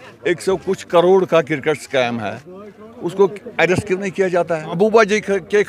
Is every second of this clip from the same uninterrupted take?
no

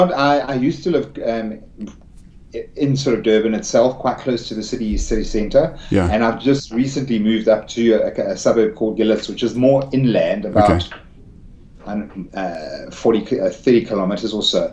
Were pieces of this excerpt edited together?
no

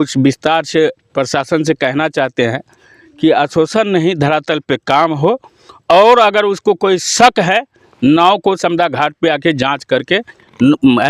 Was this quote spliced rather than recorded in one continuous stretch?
no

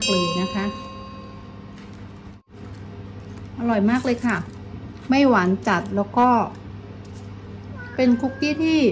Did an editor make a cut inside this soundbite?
yes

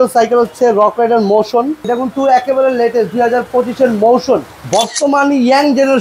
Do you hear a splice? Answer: yes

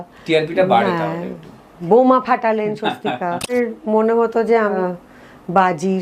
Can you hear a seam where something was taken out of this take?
yes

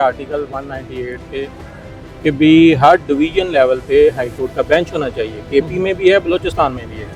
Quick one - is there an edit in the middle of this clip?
no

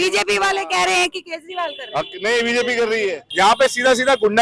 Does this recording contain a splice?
yes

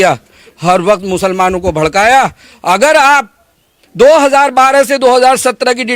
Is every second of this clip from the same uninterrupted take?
yes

